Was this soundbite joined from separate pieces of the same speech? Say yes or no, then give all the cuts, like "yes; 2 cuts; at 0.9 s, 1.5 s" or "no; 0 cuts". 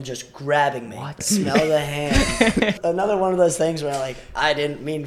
yes; 2 cuts; at 1.2 s, 2.8 s